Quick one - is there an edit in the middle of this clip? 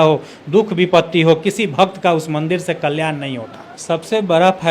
yes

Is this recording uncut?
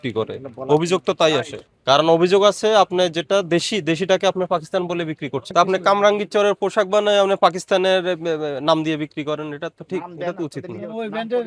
no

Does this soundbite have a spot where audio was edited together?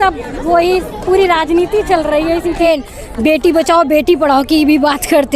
yes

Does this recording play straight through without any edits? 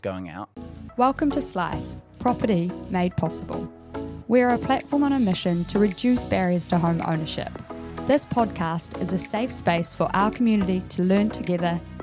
no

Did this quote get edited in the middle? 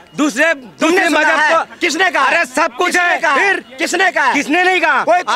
no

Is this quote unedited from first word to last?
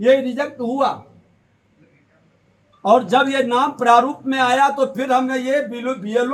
yes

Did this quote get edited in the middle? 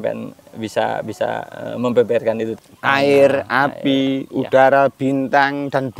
yes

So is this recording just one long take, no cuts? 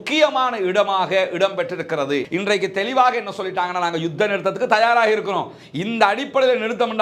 no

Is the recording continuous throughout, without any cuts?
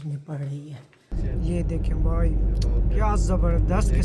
no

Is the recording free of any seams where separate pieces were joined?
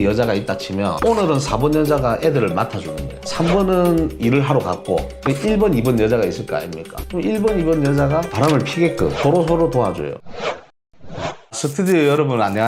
no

